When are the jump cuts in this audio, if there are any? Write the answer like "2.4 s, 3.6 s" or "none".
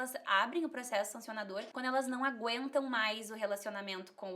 1.7 s